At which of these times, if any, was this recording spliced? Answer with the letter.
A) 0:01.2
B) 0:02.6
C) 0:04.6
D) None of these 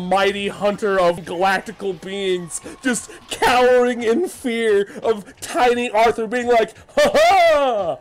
A